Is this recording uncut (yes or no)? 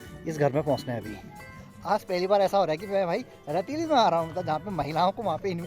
no